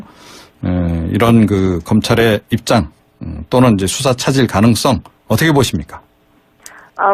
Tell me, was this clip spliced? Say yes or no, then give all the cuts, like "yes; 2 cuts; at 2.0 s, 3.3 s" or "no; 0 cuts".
yes; 1 cut; at 3.0 s